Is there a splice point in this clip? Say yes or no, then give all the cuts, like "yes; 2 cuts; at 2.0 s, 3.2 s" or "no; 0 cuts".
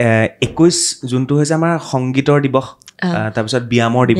no; 0 cuts